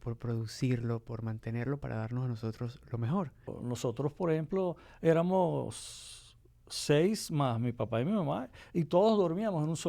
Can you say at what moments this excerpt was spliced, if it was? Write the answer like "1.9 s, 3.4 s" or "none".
3.4 s